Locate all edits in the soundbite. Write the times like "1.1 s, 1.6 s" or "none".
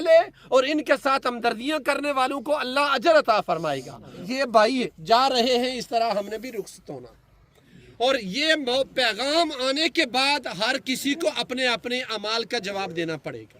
4.2 s

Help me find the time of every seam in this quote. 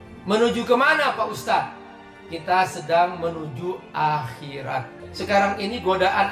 5.0 s

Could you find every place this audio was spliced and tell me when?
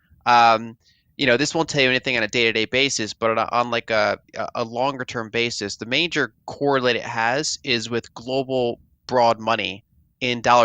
none

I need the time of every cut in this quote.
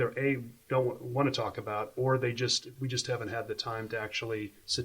2.6 s

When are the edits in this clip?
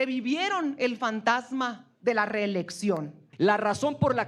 3.2 s

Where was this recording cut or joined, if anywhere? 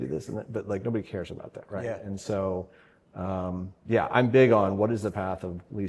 none

